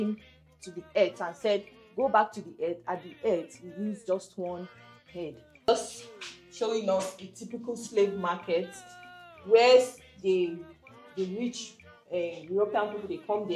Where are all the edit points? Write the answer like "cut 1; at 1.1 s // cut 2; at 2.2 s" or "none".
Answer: cut 1; at 5.7 s